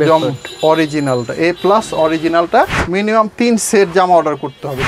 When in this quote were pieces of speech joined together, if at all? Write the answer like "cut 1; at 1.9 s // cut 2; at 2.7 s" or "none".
cut 1; at 2.8 s